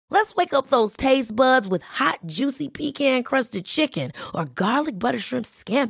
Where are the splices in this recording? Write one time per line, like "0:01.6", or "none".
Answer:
none